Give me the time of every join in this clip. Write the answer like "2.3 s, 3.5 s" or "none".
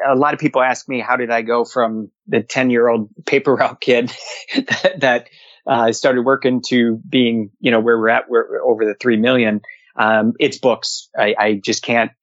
none